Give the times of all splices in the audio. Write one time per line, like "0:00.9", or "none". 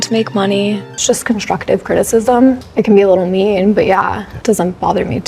0:00.9
0:02.6
0:04.3